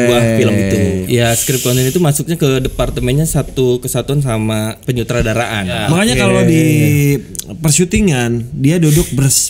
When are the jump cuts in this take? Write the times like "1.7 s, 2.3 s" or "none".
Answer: 1.0 s, 5.8 s